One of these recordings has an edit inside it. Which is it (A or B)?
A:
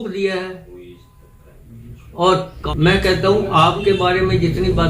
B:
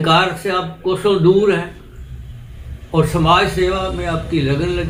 A